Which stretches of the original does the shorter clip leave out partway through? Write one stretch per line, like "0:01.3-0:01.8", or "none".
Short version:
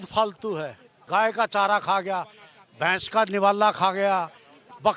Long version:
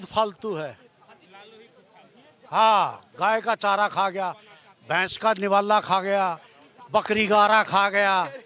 0:00.9-0:03.0